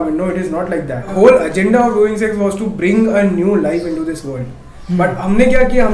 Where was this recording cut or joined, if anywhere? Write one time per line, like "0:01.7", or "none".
0:01.1